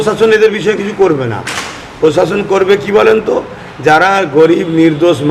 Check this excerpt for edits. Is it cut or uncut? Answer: uncut